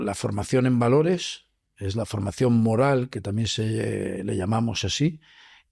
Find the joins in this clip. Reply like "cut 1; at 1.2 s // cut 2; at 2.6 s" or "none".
none